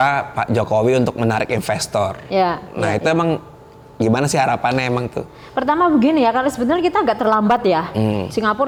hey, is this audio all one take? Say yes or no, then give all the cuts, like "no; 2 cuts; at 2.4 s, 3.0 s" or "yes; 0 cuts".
yes; 0 cuts